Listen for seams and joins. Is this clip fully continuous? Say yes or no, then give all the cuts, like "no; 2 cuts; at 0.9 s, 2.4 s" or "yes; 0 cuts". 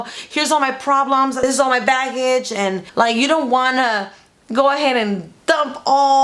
no; 2 cuts; at 1.4 s, 2.8 s